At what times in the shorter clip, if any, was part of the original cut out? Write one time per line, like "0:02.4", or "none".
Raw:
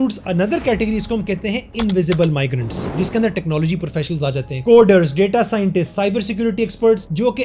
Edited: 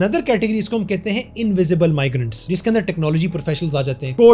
0:02.3